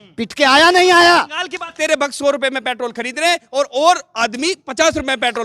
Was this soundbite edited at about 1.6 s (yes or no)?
yes